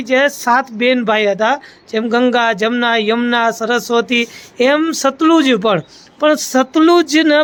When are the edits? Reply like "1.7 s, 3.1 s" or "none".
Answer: none